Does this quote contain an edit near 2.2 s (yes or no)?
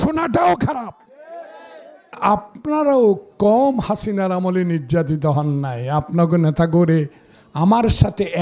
yes